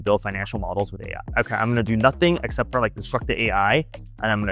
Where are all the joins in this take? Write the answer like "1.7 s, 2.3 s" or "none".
1.3 s